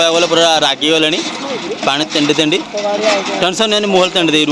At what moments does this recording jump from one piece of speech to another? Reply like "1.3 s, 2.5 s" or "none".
none